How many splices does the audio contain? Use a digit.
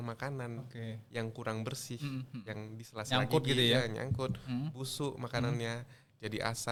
0